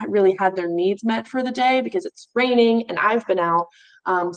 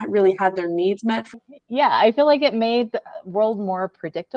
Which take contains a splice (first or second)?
second